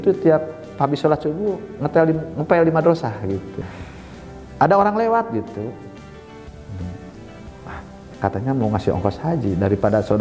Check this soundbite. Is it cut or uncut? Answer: cut